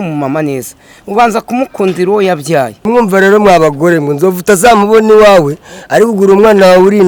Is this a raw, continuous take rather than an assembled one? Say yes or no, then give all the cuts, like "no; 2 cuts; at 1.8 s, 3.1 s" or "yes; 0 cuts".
yes; 0 cuts